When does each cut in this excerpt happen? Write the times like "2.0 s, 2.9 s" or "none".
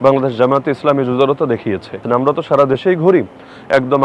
2.0 s